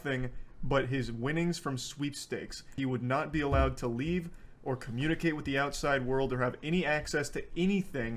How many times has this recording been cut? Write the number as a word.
one